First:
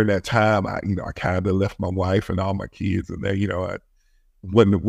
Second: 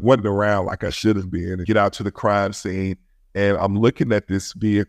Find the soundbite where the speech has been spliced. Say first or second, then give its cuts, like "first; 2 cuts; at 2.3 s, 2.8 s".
second; 1 cut; at 1.5 s